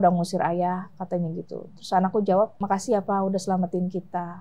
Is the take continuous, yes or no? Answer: no